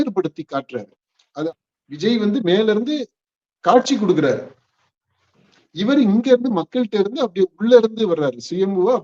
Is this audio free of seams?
no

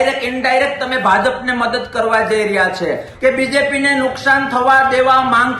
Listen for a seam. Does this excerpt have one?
yes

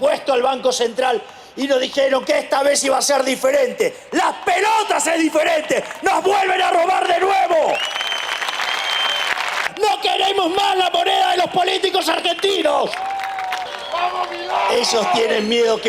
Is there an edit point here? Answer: yes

